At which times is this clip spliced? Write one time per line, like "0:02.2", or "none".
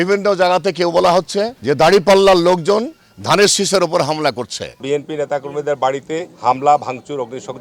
0:01.6
0:04.8